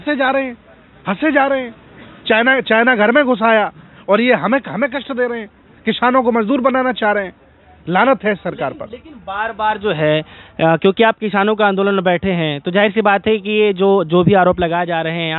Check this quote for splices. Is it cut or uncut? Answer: uncut